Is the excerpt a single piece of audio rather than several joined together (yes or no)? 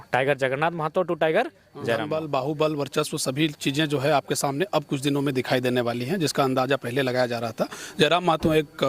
no